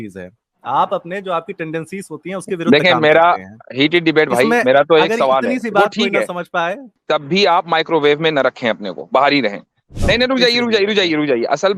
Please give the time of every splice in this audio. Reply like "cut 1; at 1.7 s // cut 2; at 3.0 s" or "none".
cut 1; at 6.9 s // cut 2; at 9.9 s